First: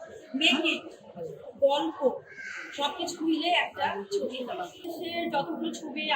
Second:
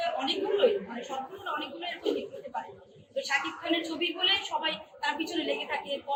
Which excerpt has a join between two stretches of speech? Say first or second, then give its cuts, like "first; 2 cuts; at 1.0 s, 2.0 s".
first; 1 cut; at 4.7 s